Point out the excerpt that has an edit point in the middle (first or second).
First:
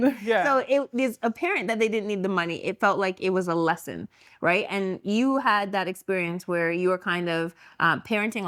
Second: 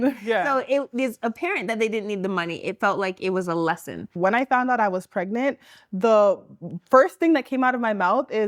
second